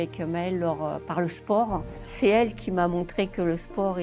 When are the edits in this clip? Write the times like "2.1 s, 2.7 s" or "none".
1.9 s